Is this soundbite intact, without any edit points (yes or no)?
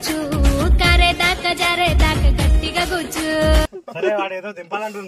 yes